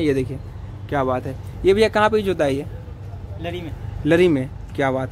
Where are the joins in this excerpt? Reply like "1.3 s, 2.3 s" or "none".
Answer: none